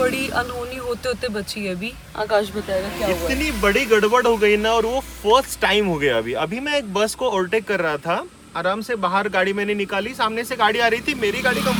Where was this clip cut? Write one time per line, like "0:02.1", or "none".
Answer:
none

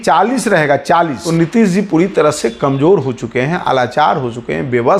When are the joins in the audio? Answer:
0:01.2

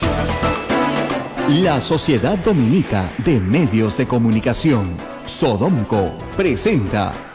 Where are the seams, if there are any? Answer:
0:01.3

